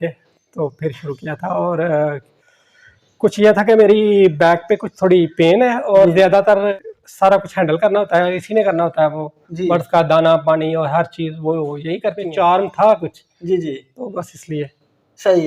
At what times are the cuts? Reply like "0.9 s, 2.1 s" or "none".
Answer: 6.7 s, 12.1 s